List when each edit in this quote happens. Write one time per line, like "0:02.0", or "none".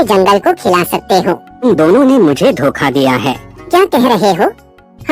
0:01.6
0:03.7